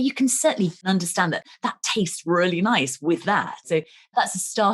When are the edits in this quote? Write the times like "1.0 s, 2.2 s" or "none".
0.9 s, 3.6 s